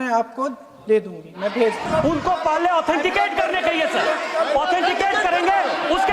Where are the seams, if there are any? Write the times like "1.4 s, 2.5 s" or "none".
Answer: 1.8 s